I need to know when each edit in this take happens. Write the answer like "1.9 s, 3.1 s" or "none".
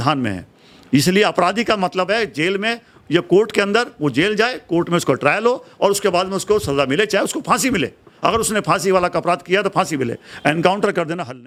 none